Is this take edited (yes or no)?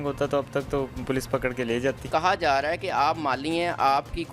yes